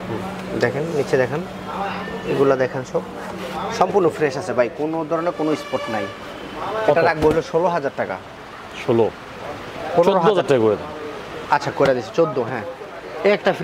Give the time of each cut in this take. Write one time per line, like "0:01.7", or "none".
none